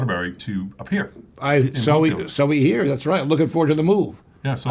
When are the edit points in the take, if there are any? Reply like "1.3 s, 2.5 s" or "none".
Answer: none